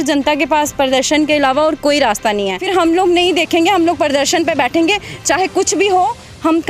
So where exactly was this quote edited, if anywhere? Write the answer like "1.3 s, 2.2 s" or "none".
2.6 s